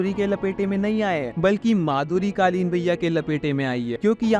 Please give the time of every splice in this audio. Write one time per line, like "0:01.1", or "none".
none